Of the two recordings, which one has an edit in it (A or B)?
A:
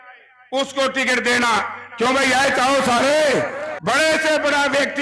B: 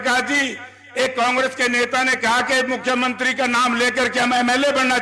A